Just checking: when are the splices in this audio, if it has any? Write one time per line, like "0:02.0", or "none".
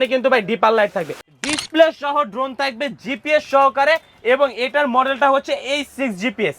0:01.1